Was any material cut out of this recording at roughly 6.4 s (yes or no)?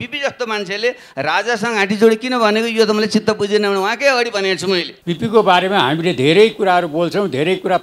no